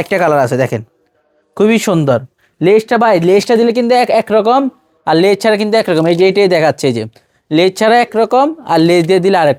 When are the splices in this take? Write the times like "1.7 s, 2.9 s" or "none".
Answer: none